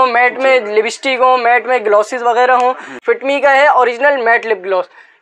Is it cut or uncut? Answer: cut